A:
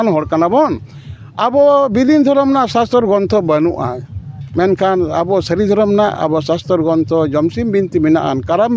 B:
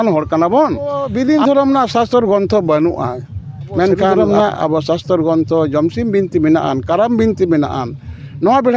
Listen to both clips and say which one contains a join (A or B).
B